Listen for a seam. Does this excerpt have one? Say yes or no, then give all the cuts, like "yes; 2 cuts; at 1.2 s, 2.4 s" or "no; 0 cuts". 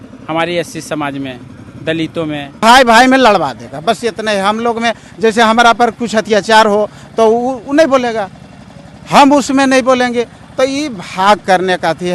yes; 1 cut; at 2.6 s